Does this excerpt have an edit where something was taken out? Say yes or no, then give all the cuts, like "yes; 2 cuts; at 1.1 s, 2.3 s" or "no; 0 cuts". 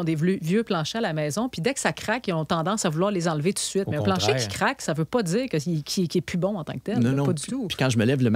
no; 0 cuts